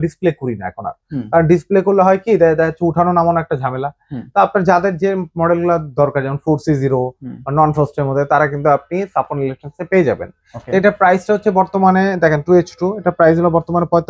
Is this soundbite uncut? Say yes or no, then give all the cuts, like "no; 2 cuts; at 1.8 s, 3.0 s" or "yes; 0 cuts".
yes; 0 cuts